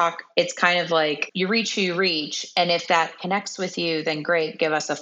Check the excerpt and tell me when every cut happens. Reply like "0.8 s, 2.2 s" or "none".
1.3 s